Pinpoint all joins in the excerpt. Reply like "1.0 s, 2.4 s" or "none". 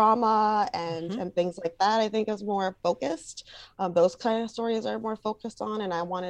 none